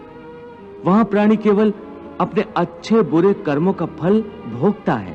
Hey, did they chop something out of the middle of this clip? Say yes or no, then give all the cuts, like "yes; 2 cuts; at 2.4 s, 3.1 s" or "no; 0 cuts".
no; 0 cuts